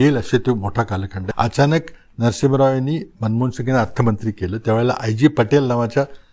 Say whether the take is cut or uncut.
cut